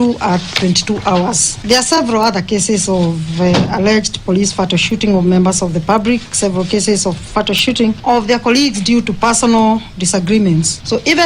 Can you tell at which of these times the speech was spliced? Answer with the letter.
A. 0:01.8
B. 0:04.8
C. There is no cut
A